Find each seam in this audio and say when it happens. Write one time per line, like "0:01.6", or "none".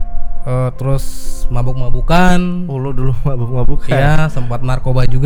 none